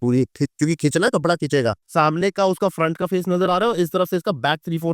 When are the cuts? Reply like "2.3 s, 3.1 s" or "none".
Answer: 1.8 s